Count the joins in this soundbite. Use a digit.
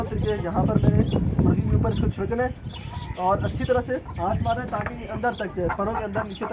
0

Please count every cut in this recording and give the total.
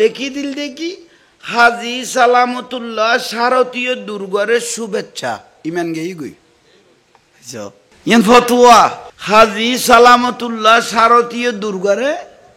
1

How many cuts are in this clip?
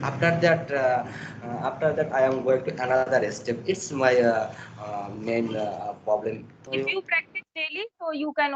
1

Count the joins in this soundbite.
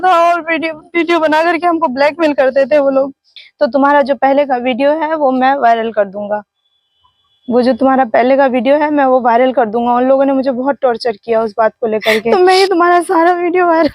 2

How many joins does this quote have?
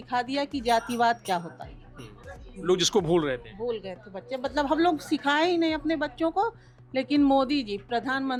0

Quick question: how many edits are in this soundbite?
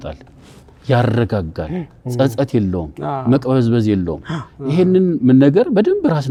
0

